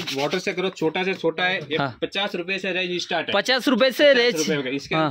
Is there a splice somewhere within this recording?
no; 0 cuts

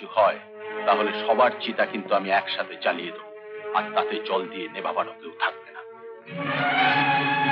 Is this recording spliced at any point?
no; 0 cuts

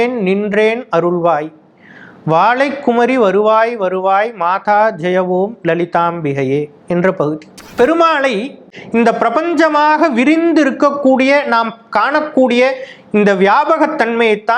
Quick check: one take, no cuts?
no; 2 cuts; at 7.6 s, 8.7 s

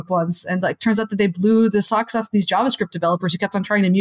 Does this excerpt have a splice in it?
no; 0 cuts

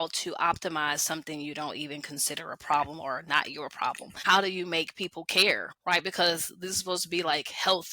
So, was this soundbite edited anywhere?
yes; 2 cuts; at 4.1 s, 5.7 s

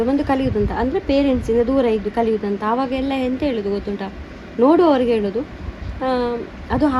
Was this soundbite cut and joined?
no; 0 cuts

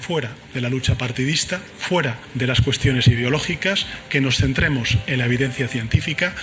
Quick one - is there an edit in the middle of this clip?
yes; 1 cut; at 2.2 s

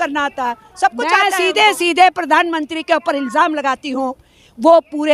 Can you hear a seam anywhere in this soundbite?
yes; 1 cut; at 1.2 s

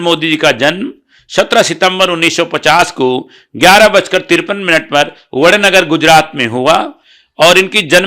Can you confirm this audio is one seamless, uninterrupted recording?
yes; 0 cuts

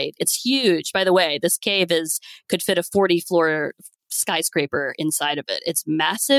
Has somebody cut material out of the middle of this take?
no; 0 cuts

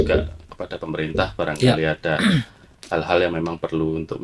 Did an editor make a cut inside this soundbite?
no; 0 cuts

